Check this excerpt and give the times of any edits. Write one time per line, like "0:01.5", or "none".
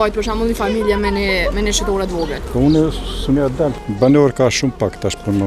0:02.4
0:03.8